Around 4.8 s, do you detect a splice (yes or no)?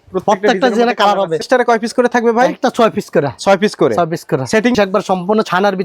yes